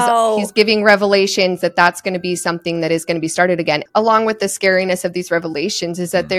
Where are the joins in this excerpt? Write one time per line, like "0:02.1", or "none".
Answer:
0:03.8